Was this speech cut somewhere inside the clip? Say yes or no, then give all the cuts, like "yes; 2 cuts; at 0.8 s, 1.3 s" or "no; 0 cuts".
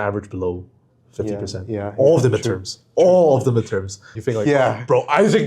yes; 1 cut; at 4.2 s